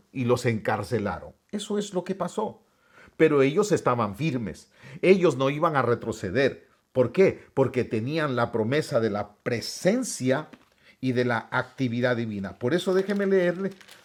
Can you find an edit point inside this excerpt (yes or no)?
no